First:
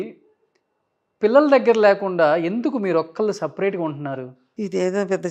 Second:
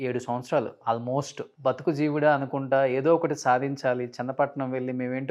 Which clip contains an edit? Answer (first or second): second